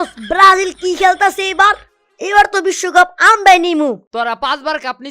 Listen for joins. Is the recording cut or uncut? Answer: cut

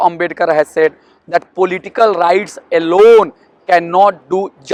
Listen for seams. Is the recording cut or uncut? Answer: uncut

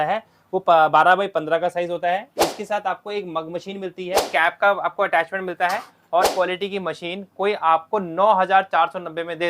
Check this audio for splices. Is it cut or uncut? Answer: cut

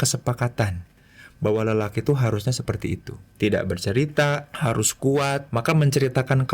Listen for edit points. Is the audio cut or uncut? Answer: cut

